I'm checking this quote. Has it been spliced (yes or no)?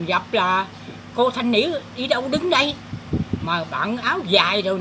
no